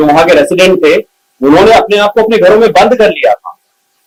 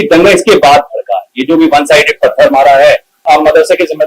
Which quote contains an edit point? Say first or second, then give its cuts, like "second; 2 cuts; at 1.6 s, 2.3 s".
second; 1 cut; at 3.1 s